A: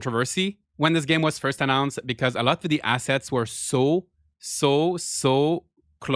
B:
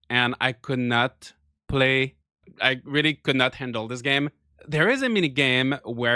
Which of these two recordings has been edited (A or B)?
B